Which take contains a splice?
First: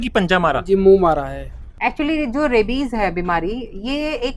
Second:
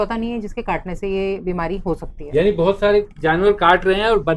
first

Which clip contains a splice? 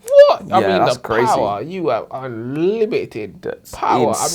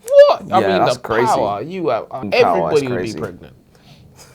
second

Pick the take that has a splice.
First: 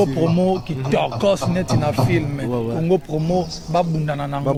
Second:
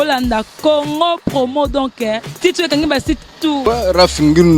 second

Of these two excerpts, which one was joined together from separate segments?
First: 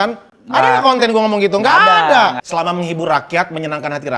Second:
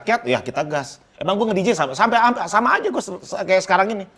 first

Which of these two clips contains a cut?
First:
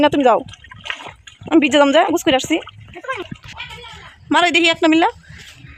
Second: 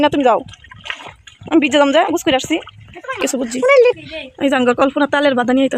second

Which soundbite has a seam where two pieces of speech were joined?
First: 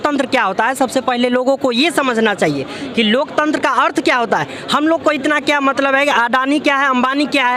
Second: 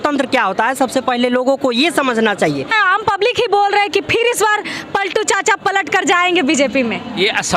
second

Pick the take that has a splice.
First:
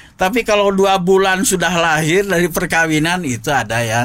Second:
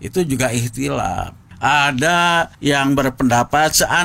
second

